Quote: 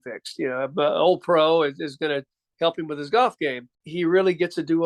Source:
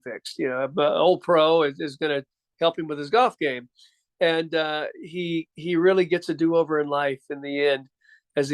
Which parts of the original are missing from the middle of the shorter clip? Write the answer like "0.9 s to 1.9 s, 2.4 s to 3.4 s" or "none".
3.8 s to 5.5 s